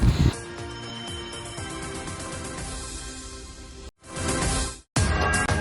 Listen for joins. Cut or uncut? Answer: uncut